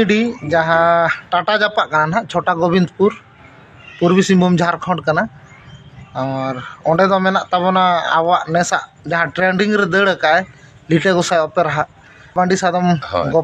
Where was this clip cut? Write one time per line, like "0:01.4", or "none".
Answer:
0:12.3